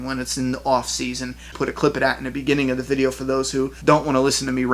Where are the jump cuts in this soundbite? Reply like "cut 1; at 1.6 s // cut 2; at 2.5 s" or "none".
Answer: cut 1; at 1.5 s // cut 2; at 3.7 s